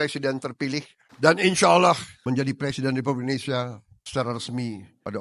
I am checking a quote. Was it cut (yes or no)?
yes